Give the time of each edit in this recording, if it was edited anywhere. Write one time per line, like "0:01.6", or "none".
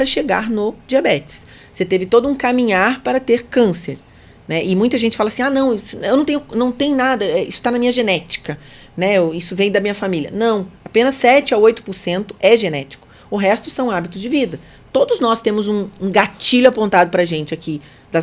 none

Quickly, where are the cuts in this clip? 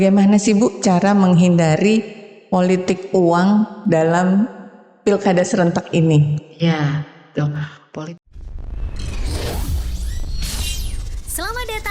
0:07.9

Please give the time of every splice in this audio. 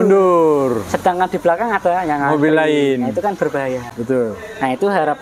none

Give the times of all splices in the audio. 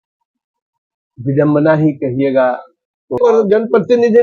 0:03.2

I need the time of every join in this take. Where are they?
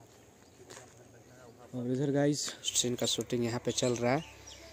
0:02.7

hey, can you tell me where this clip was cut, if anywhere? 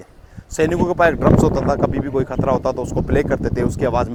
none

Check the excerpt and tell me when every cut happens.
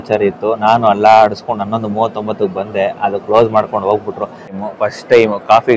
0:04.5

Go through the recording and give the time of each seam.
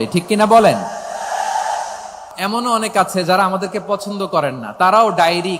0:02.3

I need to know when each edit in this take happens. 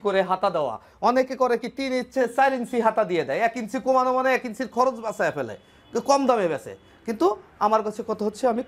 none

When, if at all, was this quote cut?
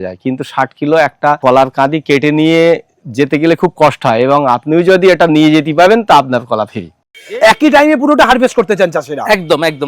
0:01.4
0:07.4

